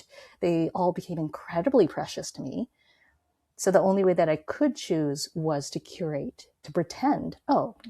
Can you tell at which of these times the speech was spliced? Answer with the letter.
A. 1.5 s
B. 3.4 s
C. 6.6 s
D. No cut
C